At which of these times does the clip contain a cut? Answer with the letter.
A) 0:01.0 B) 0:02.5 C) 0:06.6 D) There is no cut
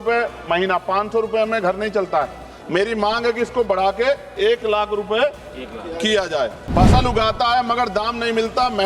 C